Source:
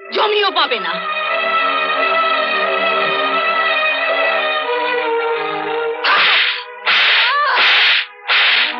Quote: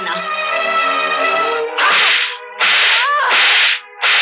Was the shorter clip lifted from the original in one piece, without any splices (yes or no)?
no